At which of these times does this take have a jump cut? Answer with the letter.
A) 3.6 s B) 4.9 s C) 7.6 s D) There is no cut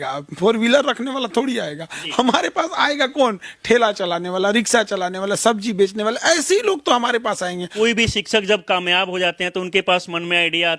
C